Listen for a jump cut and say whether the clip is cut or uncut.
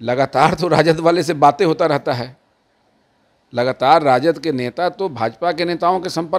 uncut